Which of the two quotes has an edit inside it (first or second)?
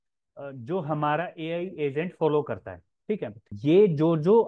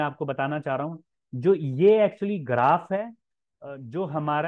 first